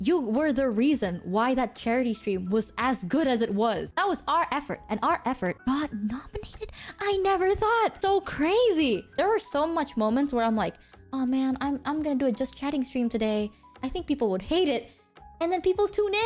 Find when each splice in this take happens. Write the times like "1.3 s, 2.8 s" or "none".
3.9 s, 5.6 s, 8.0 s, 9.1 s